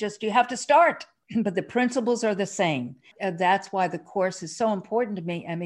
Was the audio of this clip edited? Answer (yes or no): yes